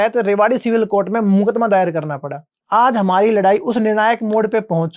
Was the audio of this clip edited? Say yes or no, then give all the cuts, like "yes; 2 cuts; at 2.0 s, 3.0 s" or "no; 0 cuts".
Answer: yes; 1 cut; at 2.6 s